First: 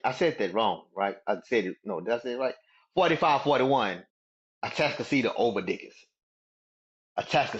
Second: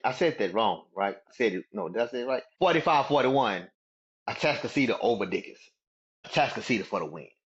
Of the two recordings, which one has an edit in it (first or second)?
second